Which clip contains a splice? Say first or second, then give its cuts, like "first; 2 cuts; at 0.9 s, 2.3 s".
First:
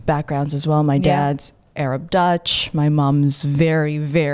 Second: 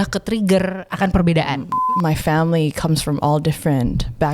second; 1 cut; at 1.7 s